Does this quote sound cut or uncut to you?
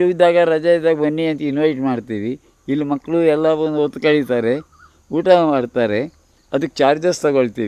uncut